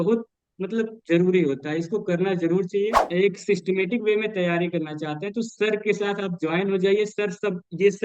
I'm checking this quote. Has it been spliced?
yes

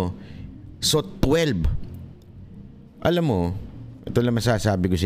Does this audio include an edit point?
no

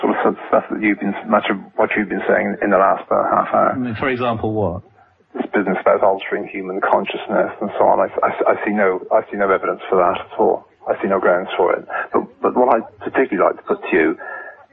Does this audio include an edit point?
yes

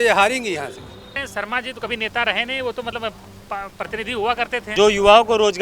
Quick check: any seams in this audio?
yes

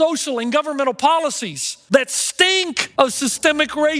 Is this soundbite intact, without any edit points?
no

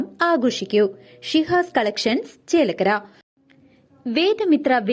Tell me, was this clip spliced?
yes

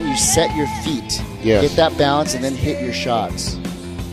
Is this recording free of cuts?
yes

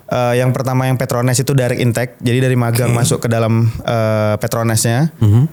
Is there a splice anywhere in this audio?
no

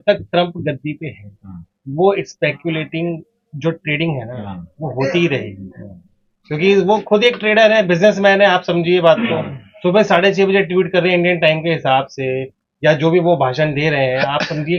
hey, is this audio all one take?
yes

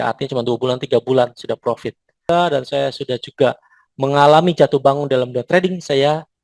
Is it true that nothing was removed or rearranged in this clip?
no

